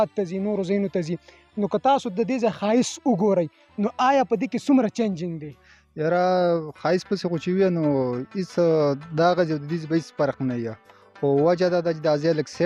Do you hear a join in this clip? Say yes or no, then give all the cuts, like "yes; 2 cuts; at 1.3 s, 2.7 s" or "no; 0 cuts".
no; 0 cuts